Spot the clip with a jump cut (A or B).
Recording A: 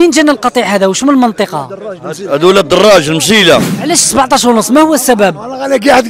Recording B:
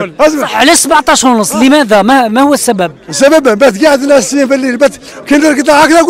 A